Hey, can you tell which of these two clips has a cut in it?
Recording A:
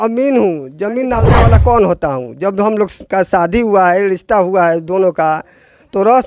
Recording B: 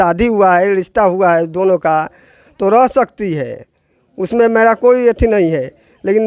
A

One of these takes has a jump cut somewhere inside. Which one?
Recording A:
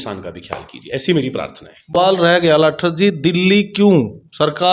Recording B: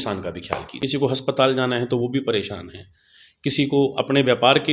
B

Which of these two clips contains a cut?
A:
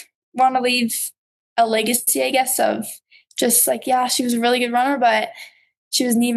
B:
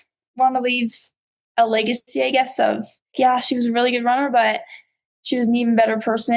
B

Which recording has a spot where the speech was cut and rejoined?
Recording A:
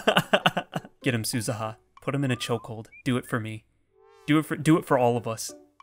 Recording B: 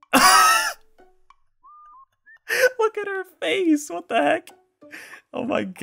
A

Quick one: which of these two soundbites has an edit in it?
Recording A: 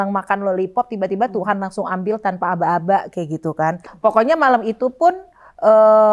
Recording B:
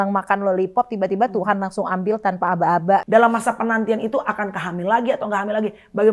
B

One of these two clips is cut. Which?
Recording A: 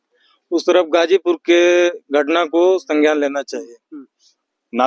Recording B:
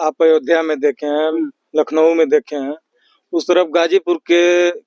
A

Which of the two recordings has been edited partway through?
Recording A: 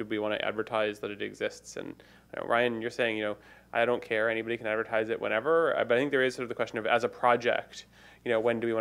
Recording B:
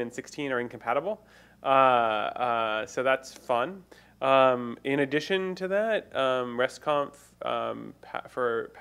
A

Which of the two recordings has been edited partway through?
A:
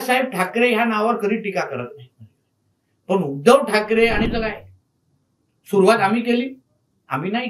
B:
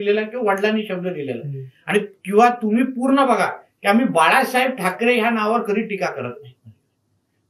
A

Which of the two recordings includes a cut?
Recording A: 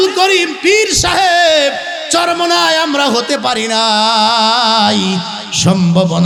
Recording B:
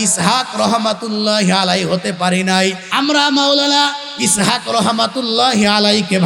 B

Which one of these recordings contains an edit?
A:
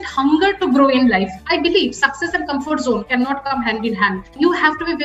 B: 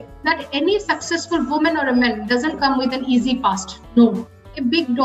A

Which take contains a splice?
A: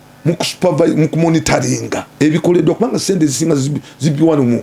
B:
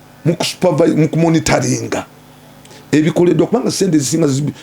A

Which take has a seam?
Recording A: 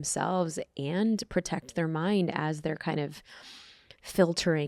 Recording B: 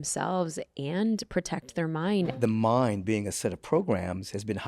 B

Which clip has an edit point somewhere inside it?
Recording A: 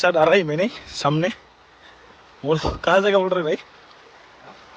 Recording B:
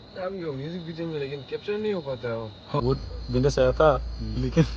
B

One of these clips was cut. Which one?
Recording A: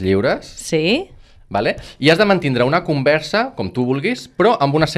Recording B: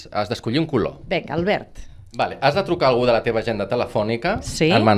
B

